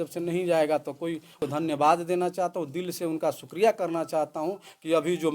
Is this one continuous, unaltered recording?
no; 1 cut; at 1.4 s

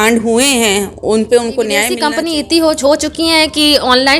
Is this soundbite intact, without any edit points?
no; 1 cut; at 1.9 s

